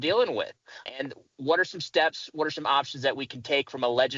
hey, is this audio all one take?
yes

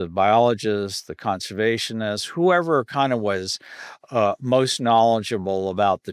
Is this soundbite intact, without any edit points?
yes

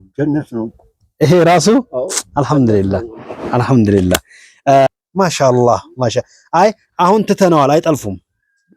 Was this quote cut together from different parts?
yes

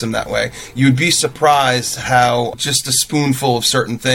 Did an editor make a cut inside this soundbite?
yes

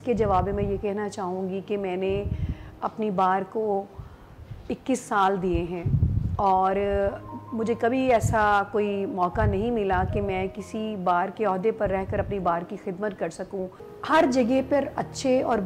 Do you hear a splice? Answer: yes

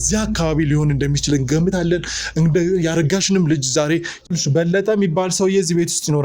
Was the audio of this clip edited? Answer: yes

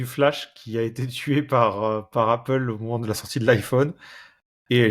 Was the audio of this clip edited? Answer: no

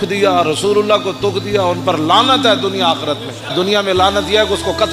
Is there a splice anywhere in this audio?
no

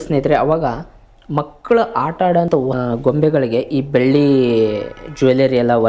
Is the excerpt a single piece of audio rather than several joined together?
no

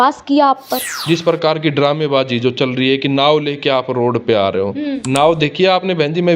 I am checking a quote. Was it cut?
yes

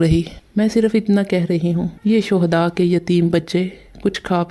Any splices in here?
no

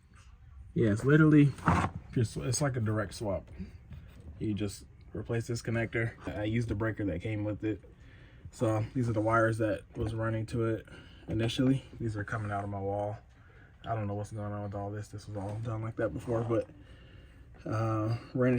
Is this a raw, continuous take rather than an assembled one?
no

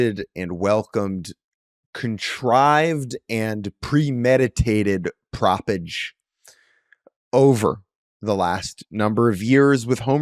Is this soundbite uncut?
yes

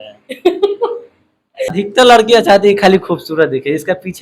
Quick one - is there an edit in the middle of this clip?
yes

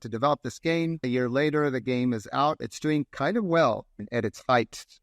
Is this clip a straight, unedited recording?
no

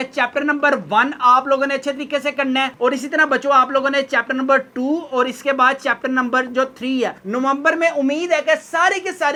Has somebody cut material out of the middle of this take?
no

